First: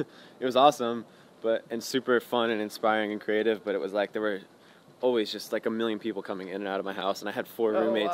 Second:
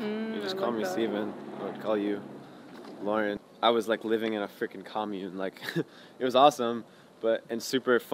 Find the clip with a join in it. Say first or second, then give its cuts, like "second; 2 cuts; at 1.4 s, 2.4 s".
second; 1 cut; at 3.5 s